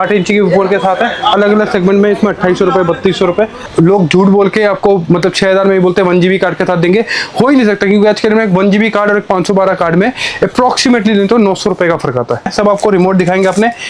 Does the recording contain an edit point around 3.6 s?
yes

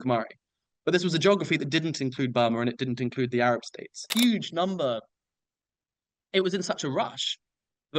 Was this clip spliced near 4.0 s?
yes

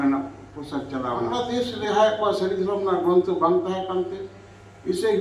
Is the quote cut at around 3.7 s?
no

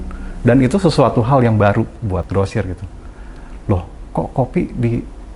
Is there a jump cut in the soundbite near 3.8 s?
no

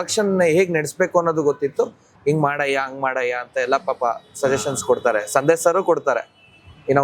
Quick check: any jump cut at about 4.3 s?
no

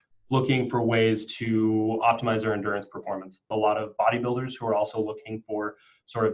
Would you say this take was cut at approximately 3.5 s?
yes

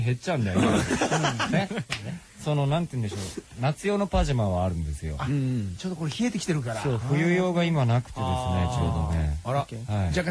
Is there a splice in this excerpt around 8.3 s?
no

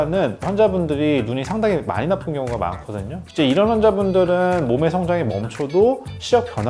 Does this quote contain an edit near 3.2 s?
yes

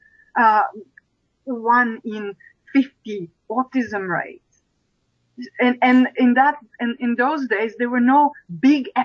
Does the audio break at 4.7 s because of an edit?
no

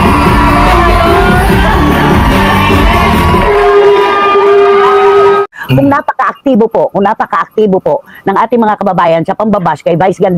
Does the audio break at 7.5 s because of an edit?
no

